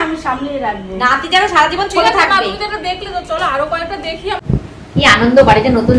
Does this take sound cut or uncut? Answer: cut